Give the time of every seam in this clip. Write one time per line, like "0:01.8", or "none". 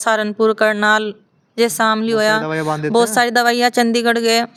none